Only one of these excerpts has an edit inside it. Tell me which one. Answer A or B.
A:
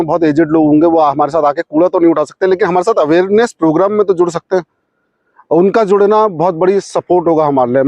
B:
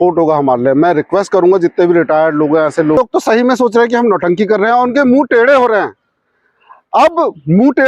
B